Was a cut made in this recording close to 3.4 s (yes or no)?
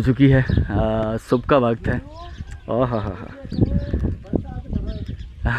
no